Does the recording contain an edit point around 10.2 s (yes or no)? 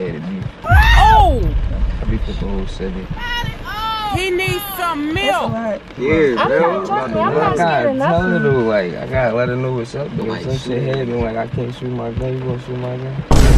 yes